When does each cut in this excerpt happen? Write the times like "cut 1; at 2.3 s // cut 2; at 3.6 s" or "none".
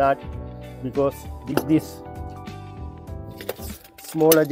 cut 1; at 1.5 s